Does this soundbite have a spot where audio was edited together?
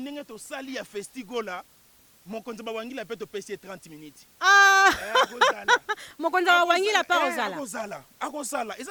no; 0 cuts

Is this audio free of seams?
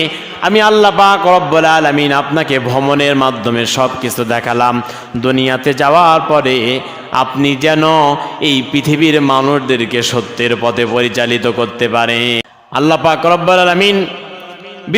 no; 1 cut; at 12.4 s

